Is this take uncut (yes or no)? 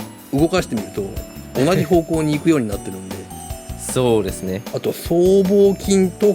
no